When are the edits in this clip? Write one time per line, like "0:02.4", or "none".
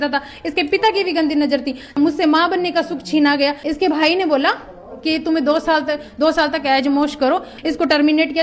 0:01.9
0:03.6
0:07.5